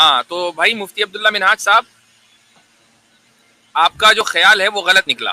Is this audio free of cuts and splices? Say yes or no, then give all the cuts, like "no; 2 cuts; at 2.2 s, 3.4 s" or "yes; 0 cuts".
yes; 0 cuts